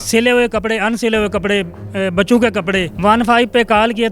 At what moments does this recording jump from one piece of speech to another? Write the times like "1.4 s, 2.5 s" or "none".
2.9 s

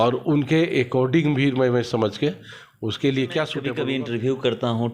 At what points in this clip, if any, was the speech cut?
3.7 s

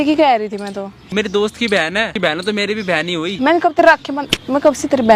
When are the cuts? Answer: 1.0 s, 3.4 s

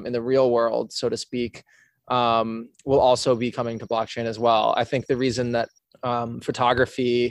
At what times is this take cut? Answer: none

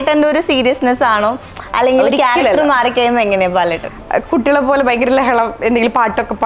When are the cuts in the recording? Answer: 3.9 s

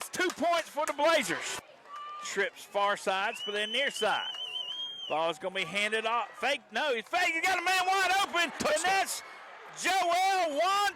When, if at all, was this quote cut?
1.6 s

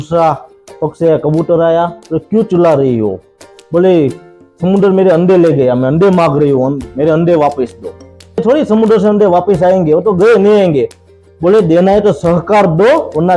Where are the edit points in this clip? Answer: 8.4 s

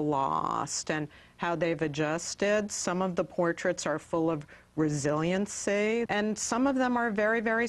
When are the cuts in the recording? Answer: 6.1 s

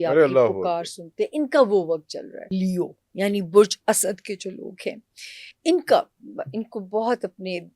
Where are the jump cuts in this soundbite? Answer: 2.5 s

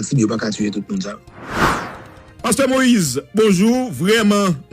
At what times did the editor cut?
1.2 s

